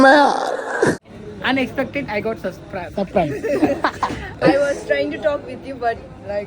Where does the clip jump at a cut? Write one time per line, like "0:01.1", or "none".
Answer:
0:00.9